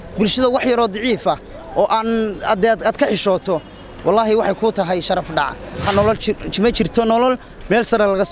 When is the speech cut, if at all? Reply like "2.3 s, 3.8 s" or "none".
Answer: 5.9 s